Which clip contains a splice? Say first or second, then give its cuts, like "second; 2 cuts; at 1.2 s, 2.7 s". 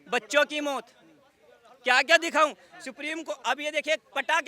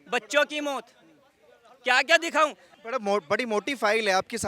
second; 1 cut; at 2.8 s